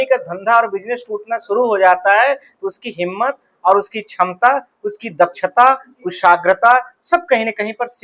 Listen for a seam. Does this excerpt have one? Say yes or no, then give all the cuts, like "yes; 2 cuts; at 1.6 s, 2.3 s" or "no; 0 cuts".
no; 0 cuts